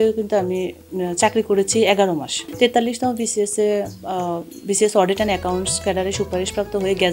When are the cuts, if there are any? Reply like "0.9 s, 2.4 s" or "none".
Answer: 2.4 s